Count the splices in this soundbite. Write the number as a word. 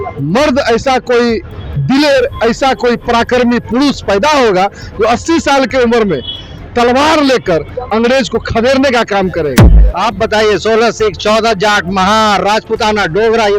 one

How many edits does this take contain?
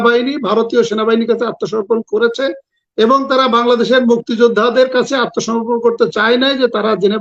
zero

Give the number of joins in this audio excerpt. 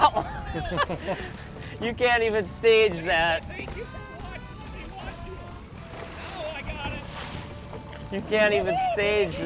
zero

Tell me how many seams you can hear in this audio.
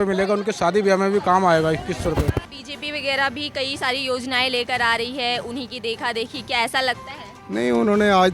one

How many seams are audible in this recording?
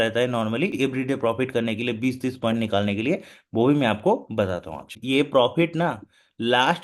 two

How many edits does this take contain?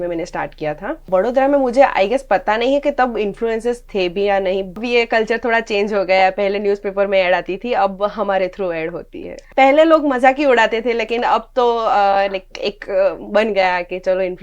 three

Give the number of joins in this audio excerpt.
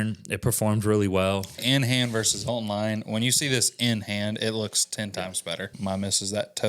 two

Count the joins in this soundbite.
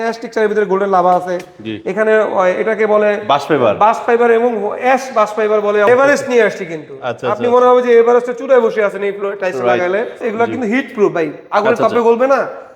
two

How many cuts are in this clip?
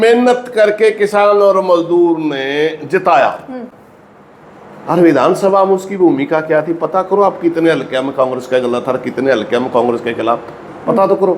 zero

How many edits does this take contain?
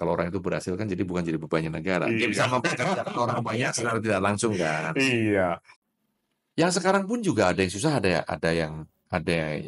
one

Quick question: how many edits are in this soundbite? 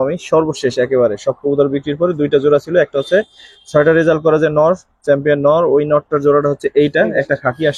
zero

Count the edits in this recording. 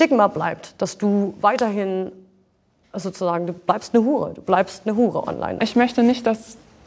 one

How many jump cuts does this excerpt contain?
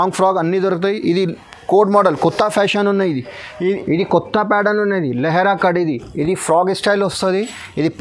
one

